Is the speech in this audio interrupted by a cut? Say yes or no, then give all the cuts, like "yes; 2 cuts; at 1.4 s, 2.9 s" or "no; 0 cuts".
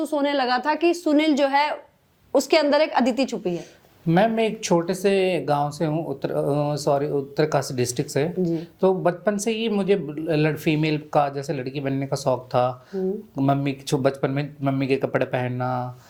no; 0 cuts